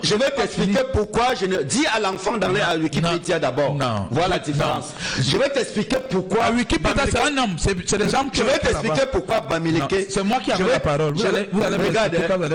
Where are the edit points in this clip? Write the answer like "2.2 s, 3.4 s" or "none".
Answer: none